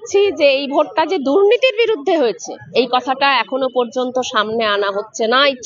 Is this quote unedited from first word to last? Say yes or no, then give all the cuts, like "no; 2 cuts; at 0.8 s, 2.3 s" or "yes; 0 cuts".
yes; 0 cuts